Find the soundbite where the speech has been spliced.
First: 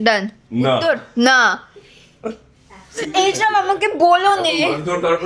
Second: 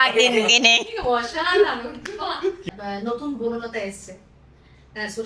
second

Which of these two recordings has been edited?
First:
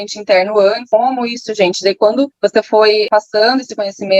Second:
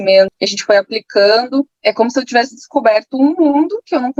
first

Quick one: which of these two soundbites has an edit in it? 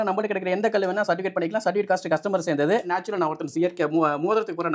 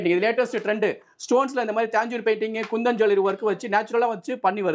first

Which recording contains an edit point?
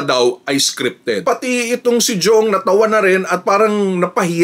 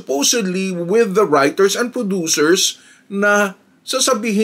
first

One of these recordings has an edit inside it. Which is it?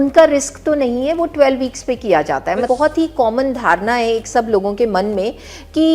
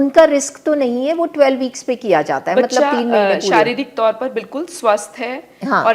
first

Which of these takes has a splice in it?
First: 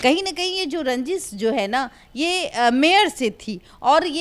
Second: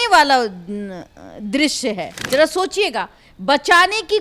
second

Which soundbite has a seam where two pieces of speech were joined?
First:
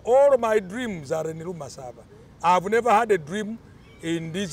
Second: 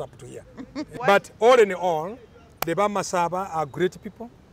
second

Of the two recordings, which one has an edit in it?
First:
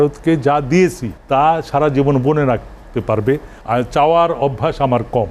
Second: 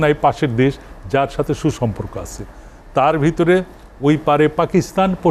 first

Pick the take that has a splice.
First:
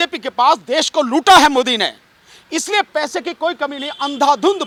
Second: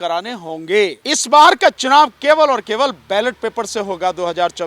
second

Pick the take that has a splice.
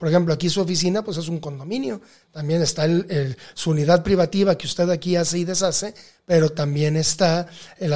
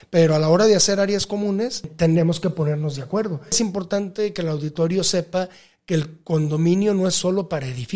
second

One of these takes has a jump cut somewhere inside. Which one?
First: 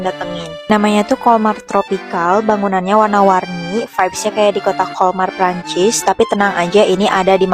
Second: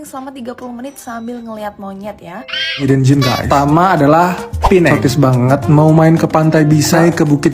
second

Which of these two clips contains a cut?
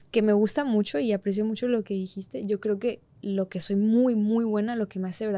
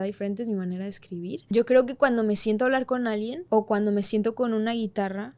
second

